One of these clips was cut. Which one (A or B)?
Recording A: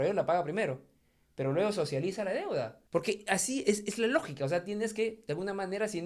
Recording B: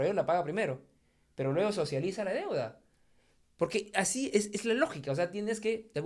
A